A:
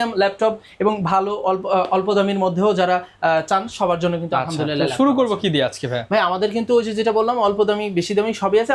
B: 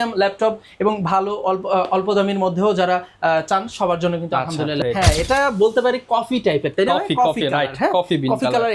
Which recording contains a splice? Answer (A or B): B